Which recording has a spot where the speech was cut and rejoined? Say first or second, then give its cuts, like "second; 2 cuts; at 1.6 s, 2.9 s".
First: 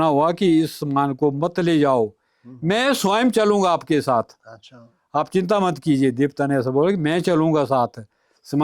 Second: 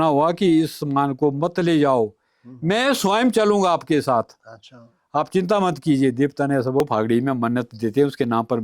second; 1 cut; at 6.8 s